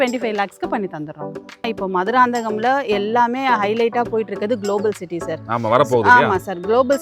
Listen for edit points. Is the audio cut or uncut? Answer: cut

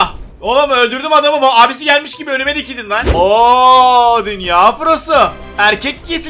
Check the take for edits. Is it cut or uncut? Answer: cut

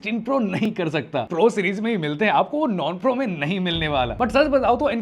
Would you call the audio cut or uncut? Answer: cut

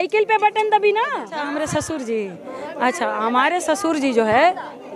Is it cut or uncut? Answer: cut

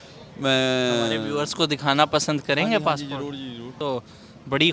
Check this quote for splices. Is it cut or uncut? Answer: cut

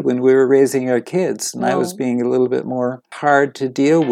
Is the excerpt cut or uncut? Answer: cut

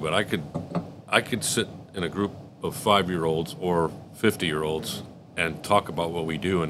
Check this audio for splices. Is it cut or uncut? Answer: uncut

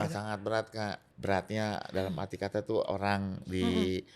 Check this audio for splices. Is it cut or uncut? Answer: cut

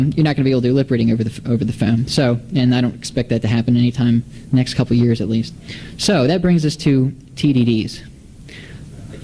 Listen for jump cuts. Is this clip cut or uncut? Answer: cut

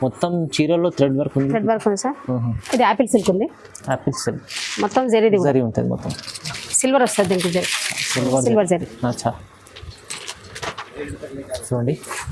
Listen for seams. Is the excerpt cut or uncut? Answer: cut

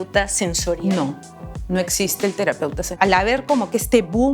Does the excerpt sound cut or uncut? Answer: cut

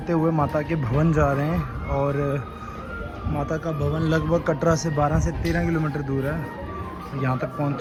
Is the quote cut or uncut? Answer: uncut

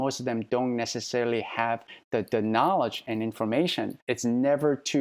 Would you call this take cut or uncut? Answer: cut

